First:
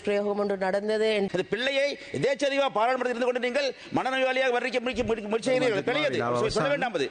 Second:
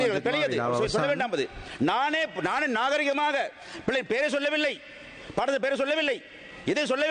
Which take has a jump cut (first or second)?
first